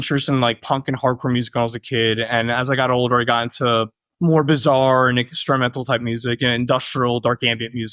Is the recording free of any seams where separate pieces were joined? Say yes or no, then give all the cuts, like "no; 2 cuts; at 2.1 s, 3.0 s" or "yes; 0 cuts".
yes; 0 cuts